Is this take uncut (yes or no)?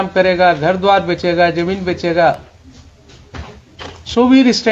yes